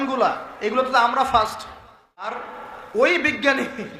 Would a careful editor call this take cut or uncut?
cut